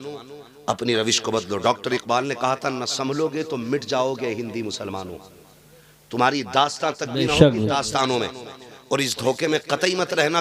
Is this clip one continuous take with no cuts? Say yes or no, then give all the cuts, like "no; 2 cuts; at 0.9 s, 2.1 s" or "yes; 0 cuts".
yes; 0 cuts